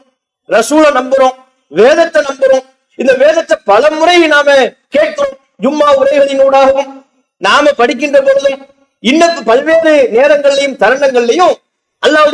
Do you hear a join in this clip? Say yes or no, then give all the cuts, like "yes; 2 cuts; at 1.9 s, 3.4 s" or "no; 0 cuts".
no; 0 cuts